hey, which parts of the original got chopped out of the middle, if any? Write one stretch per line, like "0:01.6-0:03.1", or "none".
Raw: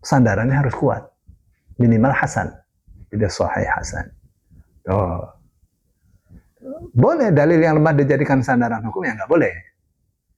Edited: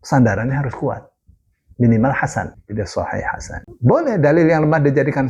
0:02.6-0:03.0
0:04.1-0:06.8